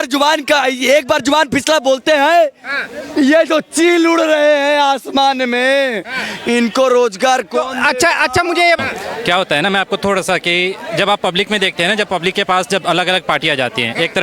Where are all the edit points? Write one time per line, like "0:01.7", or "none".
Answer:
0:08.8